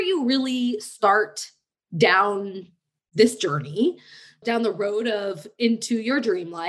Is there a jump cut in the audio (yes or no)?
no